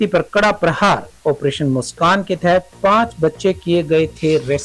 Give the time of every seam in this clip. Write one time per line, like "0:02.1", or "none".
none